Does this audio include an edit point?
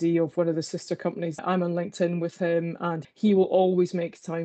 yes; 2 cuts; at 1.3 s, 3.0 s

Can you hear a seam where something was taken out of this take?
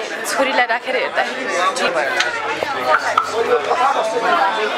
yes; 1 cut; at 1.9 s

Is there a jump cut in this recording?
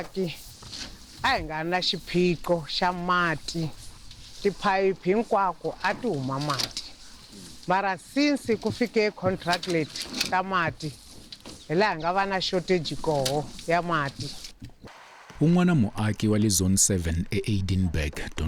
no; 0 cuts

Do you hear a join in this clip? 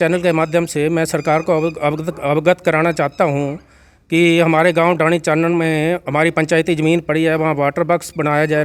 no; 0 cuts

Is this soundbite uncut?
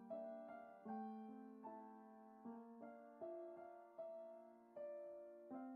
yes; 0 cuts

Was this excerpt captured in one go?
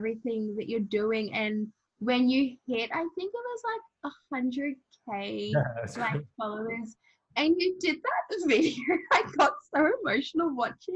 yes; 0 cuts

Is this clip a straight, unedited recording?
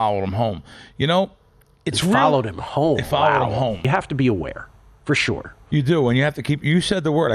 no; 1 cut; at 3.8 s

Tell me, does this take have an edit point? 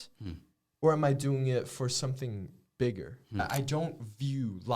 yes; 1 cut; at 3.5 s

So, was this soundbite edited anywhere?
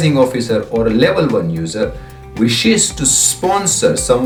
no; 0 cuts

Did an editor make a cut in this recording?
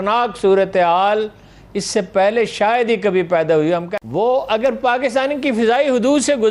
yes; 1 cut; at 3.9 s

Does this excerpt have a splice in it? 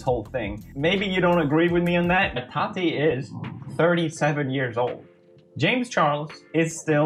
no; 0 cuts

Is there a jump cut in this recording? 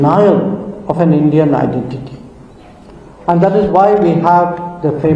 no; 0 cuts

